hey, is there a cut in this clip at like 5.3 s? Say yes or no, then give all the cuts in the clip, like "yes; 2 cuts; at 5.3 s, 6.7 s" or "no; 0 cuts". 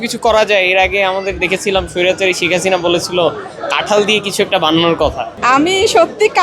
yes; 1 cut; at 5.3 s